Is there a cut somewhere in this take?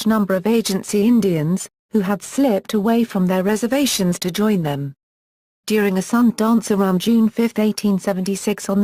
yes; 1 cut; at 1.8 s

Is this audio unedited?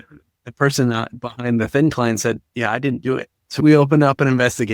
no; 1 cut; at 3.4 s

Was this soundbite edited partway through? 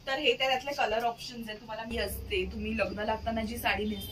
yes; 1 cut; at 1.9 s

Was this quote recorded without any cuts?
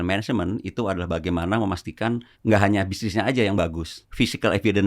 no; 2 cuts; at 2.3 s, 4.0 s

